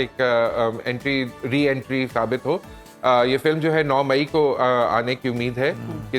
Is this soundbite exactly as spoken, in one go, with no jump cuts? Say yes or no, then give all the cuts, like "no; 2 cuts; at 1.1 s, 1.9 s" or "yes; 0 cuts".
yes; 0 cuts